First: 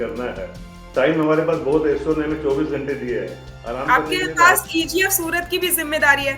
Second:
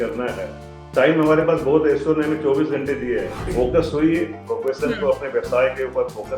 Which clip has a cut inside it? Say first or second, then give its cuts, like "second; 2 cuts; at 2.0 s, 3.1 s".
second; 1 cut; at 3.5 s